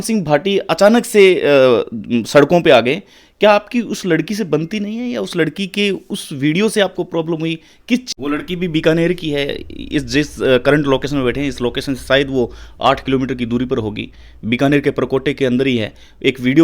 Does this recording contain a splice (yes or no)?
yes